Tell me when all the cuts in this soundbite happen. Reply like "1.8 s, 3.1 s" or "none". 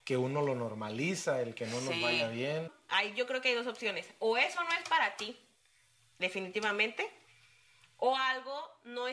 2.8 s